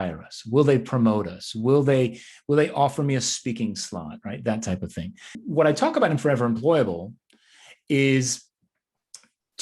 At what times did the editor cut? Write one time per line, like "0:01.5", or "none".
0:05.3